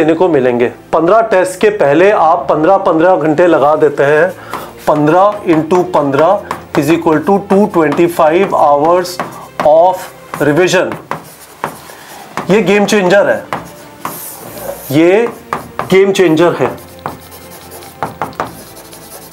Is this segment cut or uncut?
uncut